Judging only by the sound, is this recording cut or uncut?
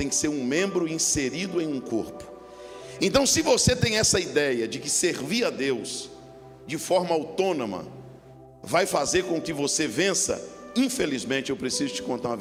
uncut